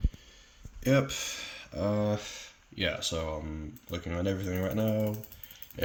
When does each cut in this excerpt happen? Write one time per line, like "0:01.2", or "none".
none